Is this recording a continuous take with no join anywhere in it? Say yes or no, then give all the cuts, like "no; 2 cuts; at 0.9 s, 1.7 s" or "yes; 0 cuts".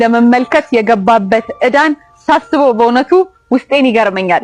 yes; 0 cuts